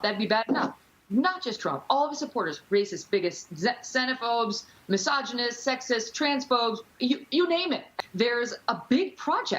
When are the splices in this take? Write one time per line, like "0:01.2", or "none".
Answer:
0:07.9